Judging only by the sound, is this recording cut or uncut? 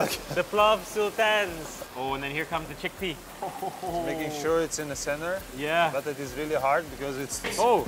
uncut